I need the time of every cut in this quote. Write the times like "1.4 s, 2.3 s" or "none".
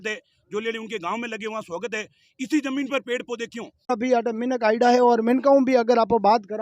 3.9 s